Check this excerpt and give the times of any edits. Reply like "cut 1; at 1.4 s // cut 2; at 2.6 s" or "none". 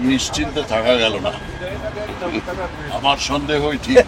none